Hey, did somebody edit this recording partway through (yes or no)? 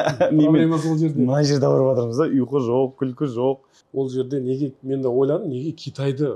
yes